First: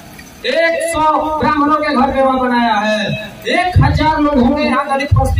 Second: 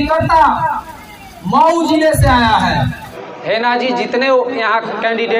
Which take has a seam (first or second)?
second